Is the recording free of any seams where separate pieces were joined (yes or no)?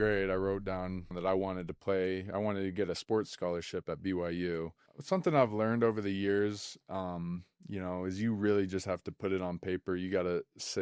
no